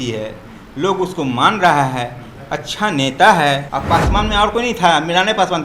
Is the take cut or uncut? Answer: cut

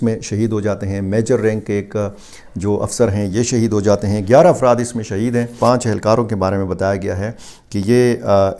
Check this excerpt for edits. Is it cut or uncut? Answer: cut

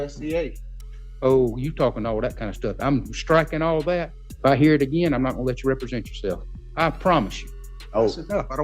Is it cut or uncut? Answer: cut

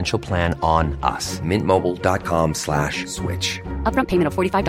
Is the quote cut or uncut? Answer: uncut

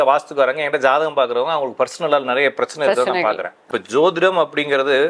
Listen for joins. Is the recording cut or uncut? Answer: cut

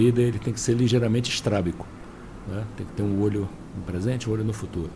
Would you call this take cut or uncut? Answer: uncut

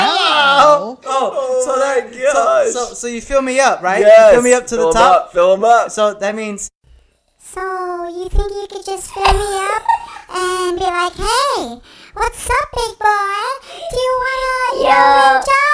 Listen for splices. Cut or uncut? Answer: cut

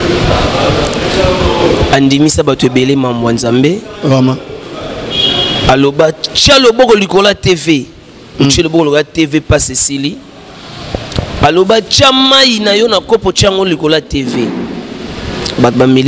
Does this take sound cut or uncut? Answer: uncut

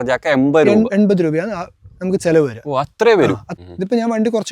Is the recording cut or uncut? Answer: cut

